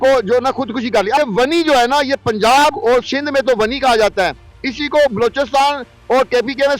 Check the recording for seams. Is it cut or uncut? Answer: cut